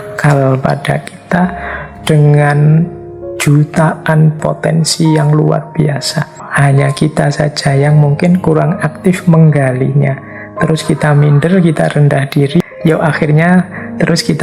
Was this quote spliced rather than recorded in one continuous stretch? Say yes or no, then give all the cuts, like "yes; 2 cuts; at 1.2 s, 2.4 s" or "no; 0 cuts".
yes; 3 cuts; at 4.4 s, 6.4 s, 12.6 s